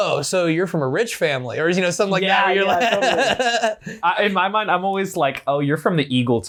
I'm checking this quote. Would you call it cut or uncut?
uncut